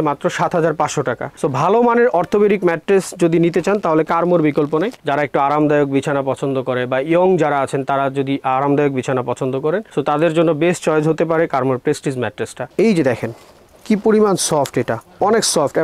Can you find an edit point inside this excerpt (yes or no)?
yes